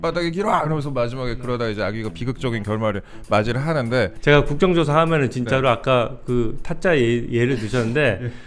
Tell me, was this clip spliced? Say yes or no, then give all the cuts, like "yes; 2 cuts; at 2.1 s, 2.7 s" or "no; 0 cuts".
yes; 1 cut; at 4.1 s